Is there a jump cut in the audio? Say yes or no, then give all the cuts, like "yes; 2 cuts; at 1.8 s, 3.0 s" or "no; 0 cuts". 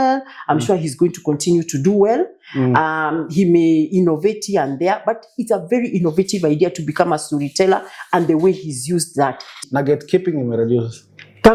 yes; 1 cut; at 9.5 s